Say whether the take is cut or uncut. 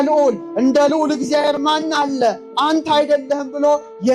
uncut